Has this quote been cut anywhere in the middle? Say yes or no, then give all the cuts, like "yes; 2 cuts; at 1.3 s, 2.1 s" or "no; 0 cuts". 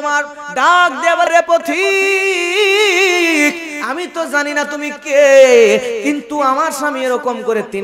yes; 1 cut; at 1.3 s